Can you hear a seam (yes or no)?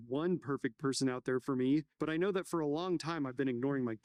no